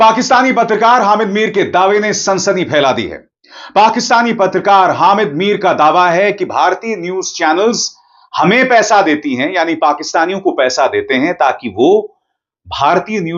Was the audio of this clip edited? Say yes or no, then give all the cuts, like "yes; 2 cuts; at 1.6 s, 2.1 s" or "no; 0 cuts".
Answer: no; 0 cuts